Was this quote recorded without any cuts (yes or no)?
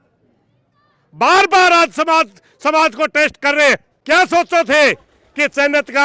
no